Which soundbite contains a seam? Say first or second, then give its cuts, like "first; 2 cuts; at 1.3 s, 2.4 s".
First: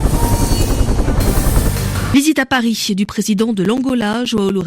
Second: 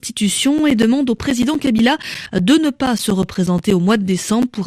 first; 1 cut; at 2.1 s